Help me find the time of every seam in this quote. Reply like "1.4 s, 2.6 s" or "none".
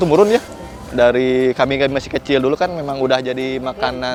none